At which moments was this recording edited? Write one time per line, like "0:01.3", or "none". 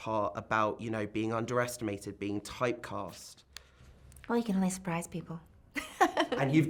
none